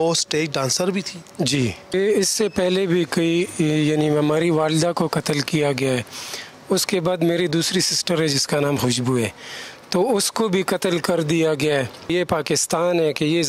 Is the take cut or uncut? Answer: cut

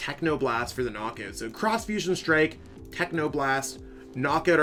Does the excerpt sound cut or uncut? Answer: uncut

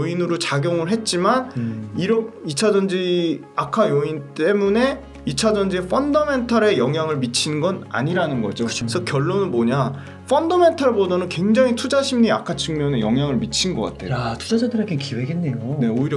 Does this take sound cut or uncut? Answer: cut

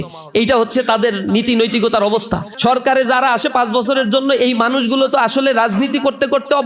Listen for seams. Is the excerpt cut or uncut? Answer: cut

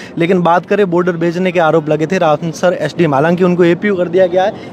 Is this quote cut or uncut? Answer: uncut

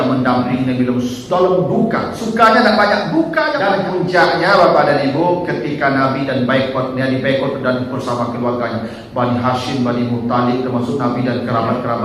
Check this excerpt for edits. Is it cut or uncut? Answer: cut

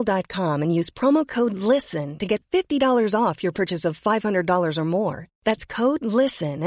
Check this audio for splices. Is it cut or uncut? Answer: uncut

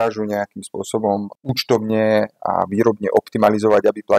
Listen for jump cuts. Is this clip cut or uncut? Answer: cut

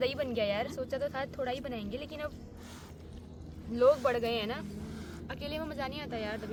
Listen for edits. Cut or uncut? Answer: uncut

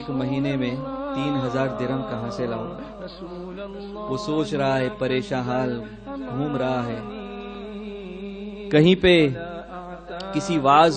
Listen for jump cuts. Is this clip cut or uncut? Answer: uncut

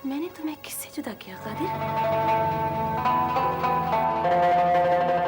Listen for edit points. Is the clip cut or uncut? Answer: cut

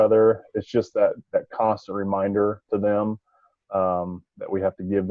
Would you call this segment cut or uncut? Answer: uncut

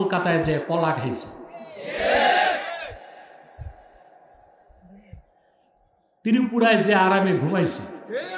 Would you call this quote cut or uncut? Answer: uncut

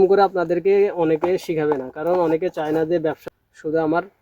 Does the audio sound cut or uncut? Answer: cut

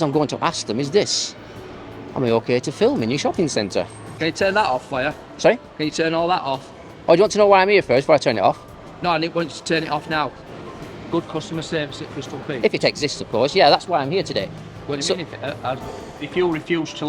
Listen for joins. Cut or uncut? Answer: cut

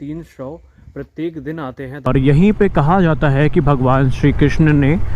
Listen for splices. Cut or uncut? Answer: cut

